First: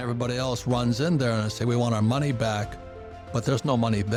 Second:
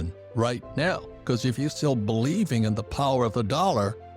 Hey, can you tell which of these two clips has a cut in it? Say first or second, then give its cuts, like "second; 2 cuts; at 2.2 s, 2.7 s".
second; 1 cut; at 1.7 s